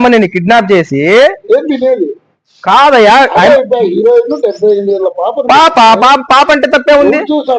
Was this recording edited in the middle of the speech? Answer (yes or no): no